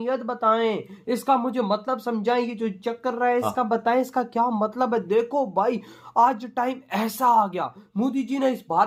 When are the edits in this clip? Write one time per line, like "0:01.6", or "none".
none